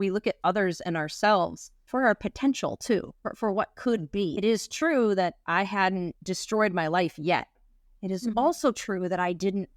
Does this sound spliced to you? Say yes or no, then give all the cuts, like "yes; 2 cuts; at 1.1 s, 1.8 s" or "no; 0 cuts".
no; 0 cuts